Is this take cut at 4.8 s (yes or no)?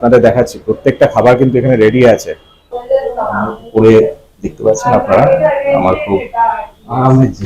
no